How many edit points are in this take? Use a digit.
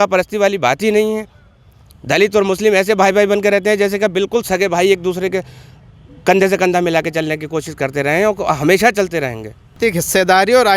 1